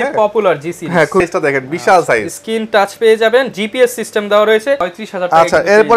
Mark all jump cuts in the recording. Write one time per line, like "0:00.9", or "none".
0:01.2
0:04.8